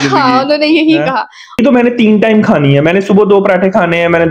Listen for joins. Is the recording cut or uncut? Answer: cut